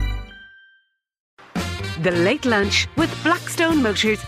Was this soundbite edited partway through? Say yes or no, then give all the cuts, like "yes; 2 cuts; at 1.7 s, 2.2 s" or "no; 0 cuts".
yes; 1 cut; at 1.4 s